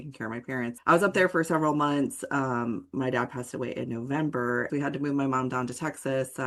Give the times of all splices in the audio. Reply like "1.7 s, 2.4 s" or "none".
0.8 s, 4.7 s